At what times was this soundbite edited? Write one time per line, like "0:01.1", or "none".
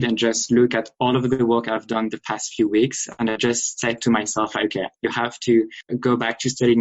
0:05.8